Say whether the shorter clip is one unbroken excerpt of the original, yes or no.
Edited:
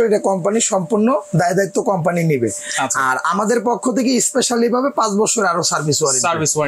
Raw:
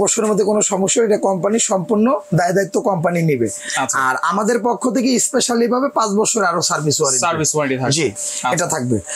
yes